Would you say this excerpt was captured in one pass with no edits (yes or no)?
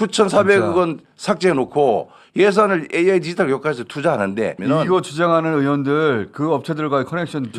no